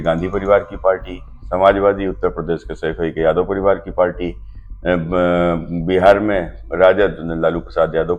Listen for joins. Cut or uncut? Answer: uncut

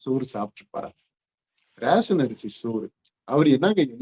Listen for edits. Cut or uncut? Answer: uncut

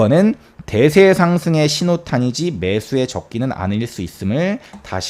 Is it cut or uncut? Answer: uncut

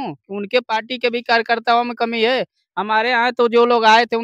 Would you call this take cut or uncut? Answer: uncut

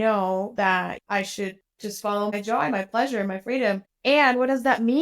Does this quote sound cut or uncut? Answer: cut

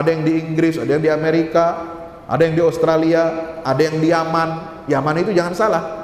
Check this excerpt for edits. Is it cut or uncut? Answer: uncut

